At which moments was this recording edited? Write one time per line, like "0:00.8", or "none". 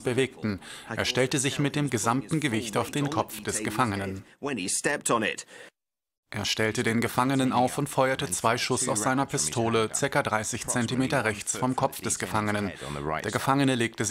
0:07.1